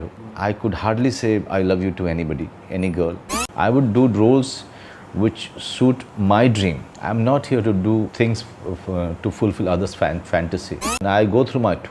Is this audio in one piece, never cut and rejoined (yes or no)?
no